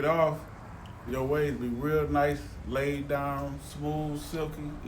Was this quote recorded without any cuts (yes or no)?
no